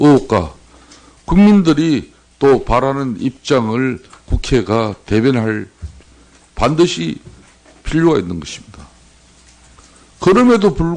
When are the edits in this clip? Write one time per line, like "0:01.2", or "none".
0:09.2